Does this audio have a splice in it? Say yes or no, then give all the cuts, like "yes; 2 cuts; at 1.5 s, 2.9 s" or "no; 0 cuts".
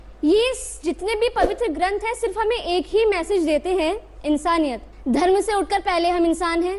yes; 1 cut; at 4.9 s